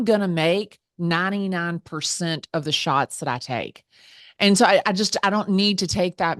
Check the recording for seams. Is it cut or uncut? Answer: uncut